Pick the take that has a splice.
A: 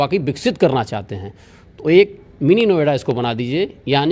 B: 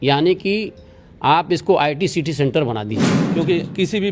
B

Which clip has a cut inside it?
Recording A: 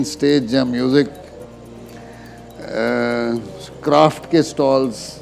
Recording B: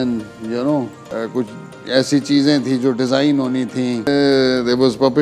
B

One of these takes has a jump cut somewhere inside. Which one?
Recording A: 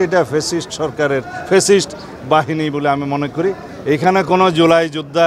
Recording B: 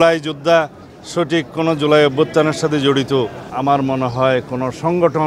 A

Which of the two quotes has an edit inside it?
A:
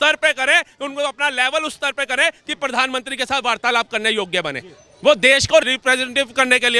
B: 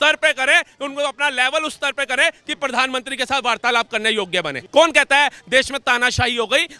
B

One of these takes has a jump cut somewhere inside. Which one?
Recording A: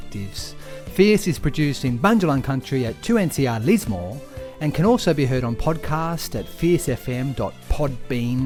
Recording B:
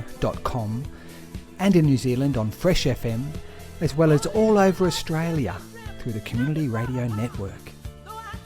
B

